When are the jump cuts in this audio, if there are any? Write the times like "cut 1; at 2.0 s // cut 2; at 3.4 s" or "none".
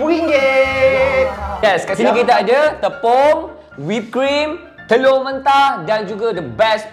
cut 1; at 1.6 s